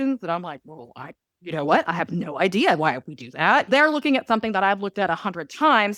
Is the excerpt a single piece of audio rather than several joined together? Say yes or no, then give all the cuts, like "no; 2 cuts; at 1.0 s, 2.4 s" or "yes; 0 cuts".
no; 1 cut; at 3.7 s